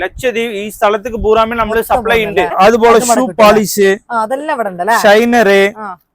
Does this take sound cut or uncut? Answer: cut